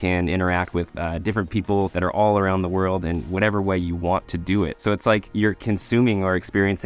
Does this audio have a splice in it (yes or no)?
no